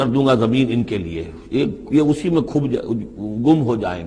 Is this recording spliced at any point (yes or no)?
no